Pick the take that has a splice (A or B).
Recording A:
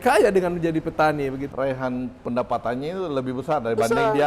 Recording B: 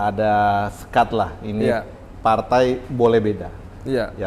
A